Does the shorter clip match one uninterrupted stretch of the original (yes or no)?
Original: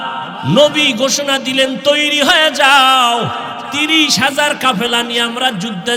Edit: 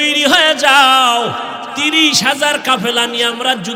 yes